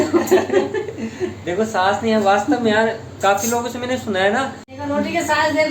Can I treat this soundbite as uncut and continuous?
no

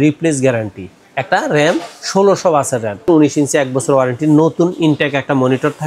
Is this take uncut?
no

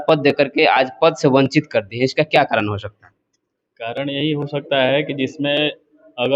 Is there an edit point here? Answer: no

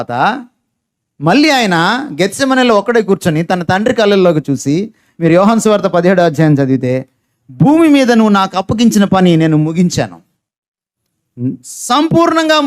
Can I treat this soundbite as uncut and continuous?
yes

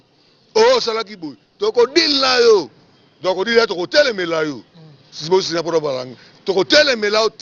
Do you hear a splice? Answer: no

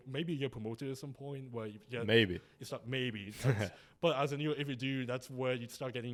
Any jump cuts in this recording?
no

